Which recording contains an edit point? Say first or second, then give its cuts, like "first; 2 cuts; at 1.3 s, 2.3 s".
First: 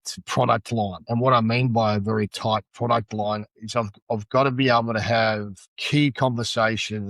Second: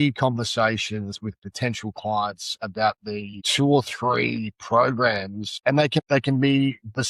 first; 1 cut; at 1.0 s